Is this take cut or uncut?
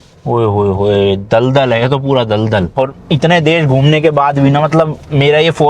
cut